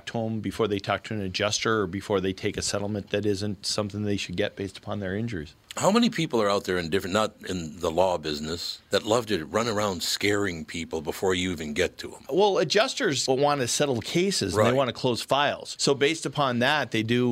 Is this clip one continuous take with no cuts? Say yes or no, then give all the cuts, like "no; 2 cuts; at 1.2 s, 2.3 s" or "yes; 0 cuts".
yes; 0 cuts